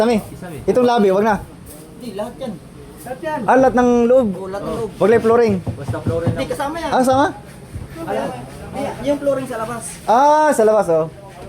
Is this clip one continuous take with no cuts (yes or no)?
yes